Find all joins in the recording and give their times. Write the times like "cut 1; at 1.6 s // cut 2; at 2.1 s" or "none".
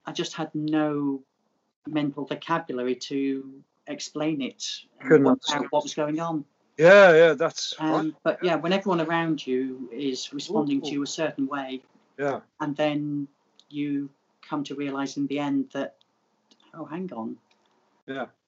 none

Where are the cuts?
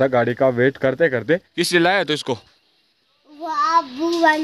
cut 1; at 1.5 s

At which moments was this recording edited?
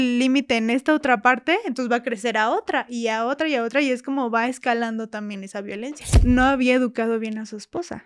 cut 1; at 6.1 s

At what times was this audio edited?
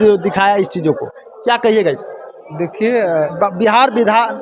cut 1; at 3.3 s

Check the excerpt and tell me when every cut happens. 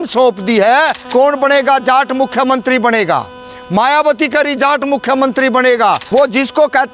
cut 1; at 1.0 s // cut 2; at 6.0 s

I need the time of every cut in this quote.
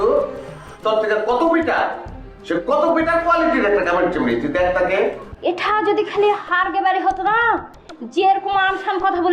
cut 1; at 5.3 s

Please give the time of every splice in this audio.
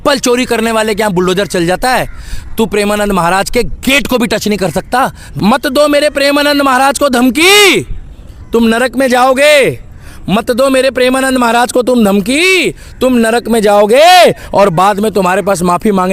cut 1; at 5.2 s

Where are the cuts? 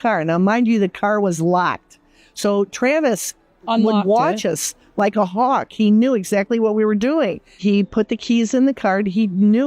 cut 1; at 7.5 s

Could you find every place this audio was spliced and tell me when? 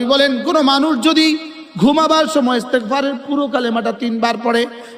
none

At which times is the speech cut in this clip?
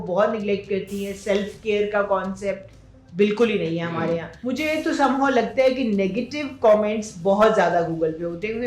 cut 1; at 4.3 s

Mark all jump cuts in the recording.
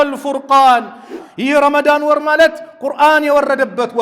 cut 1; at 1.1 s

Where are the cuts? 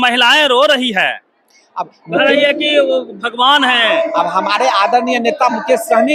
none

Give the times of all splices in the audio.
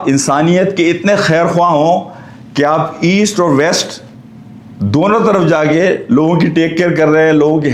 none

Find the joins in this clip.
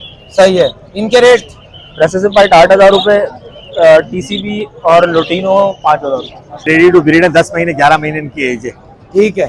cut 1; at 6.7 s

